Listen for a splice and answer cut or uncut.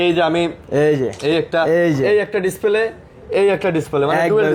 uncut